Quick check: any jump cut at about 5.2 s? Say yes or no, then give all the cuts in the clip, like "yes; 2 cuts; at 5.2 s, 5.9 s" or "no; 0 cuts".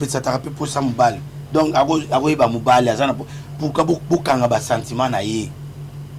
no; 0 cuts